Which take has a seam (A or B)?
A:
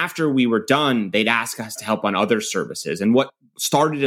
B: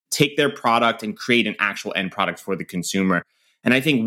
A